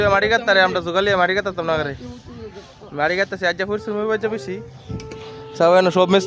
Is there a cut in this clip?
no; 0 cuts

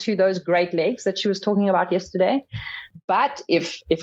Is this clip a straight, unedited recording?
no; 1 cut; at 2.8 s

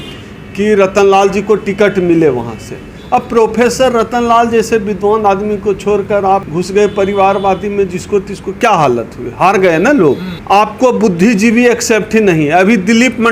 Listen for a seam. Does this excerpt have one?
yes; 1 cut; at 10.3 s

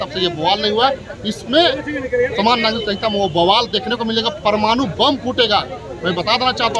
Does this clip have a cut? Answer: no; 0 cuts

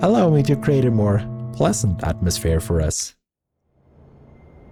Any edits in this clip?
no; 0 cuts

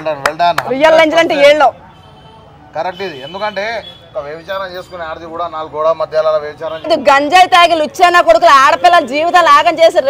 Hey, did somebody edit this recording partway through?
yes; 1 cut; at 6.9 s

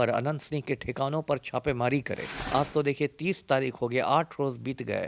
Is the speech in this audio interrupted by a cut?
yes; 1 cut; at 2.3 s

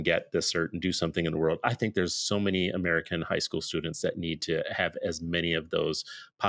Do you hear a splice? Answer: no; 0 cuts

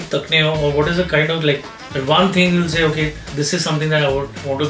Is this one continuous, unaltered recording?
yes; 0 cuts

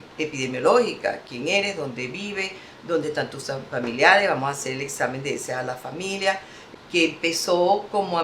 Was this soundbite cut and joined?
yes; 1 cut; at 6.5 s

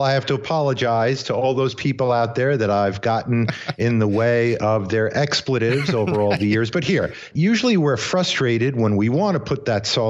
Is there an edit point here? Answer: yes; 1 cut; at 7.3 s

